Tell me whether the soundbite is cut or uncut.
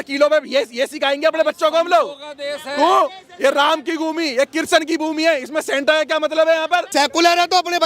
cut